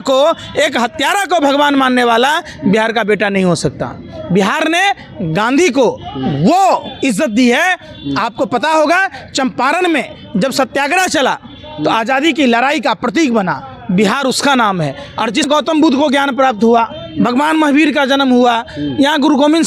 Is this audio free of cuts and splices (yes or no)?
yes